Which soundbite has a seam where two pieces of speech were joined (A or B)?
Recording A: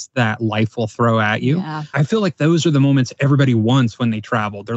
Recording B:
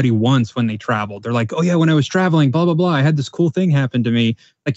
A